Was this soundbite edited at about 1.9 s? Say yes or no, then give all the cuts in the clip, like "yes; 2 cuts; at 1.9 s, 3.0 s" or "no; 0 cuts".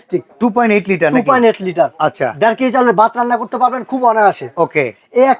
no; 0 cuts